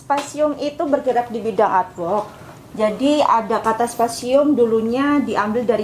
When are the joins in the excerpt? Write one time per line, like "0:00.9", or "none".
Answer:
none

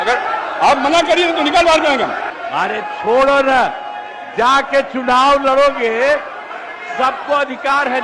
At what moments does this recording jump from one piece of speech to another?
0:02.3

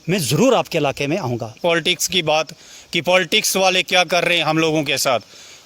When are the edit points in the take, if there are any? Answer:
0:01.5

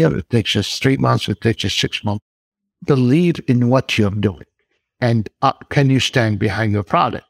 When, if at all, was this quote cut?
0:02.3

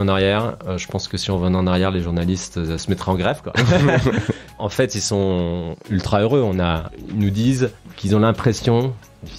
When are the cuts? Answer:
0:02.8
0:04.6
0:06.9
0:07.9

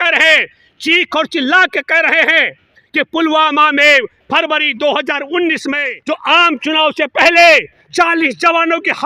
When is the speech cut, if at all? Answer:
0:05.9

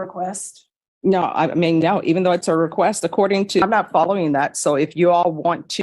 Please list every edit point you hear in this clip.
0:03.6

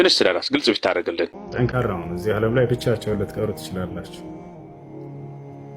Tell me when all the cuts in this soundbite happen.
0:01.4

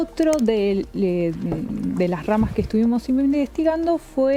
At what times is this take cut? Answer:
none

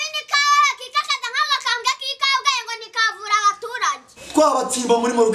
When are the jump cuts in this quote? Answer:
0:04.1

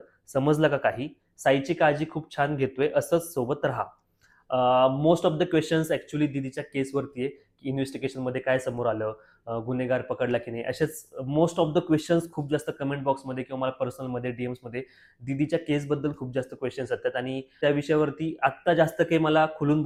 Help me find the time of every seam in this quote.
none

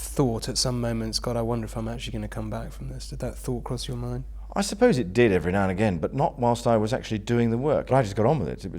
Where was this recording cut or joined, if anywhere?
0:04.4
0:07.9

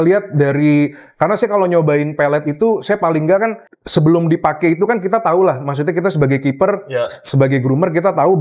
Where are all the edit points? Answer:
none

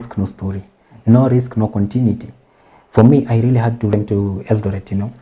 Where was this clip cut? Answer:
0:03.9

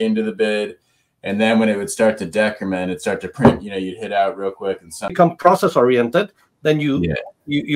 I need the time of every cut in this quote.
0:05.1

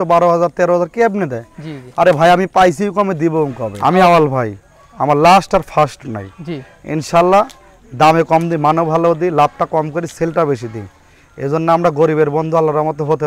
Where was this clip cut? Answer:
0:03.6

